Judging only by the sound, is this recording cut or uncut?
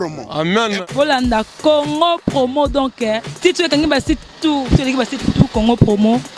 uncut